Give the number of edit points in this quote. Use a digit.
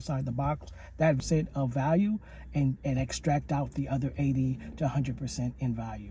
1